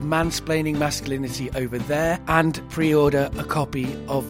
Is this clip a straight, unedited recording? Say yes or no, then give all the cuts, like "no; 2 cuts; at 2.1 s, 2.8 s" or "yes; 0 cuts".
no; 1 cut; at 2.4 s